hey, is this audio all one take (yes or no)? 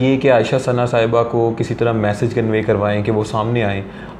yes